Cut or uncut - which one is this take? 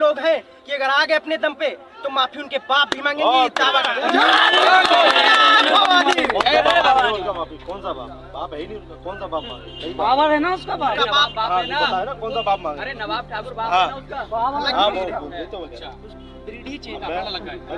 uncut